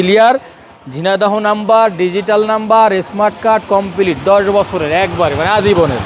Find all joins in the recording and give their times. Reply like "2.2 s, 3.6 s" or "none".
none